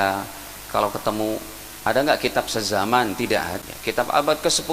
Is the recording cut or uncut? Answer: cut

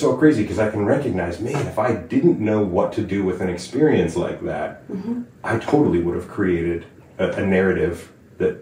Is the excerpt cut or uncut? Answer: uncut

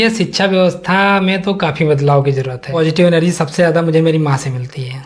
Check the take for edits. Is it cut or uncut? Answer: cut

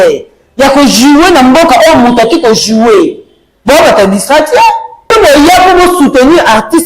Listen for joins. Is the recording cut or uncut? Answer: cut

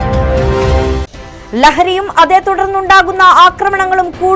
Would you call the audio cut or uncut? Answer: uncut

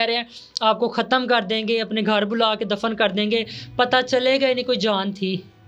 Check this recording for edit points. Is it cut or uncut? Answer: uncut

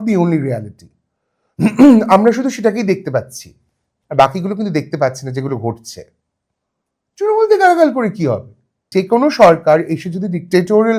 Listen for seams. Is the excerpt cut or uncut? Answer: cut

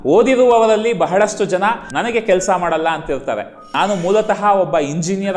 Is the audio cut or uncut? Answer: cut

